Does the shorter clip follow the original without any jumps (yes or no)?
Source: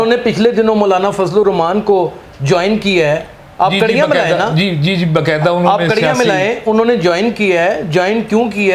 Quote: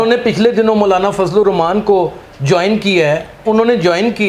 no